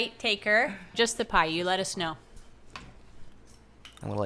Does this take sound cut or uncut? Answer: cut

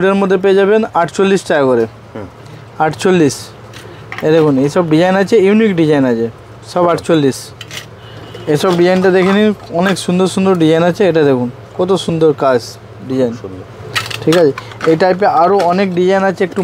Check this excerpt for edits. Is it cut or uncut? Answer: uncut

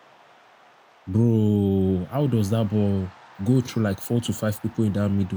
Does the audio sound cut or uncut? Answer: cut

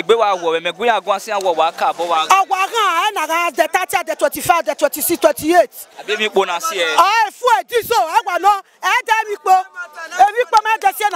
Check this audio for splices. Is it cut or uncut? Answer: uncut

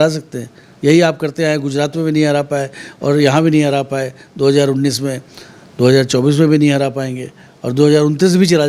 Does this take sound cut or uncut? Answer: uncut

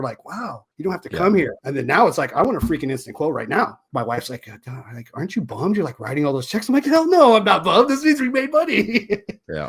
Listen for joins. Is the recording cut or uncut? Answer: cut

